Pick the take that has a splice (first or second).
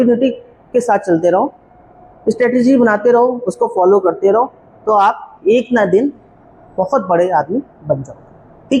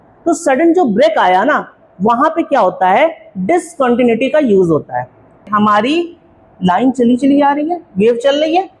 second